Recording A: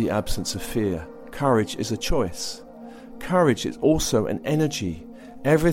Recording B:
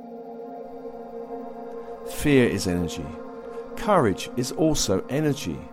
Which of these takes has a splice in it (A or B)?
B